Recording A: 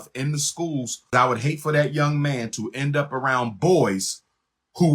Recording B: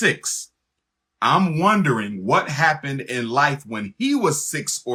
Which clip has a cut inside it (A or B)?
A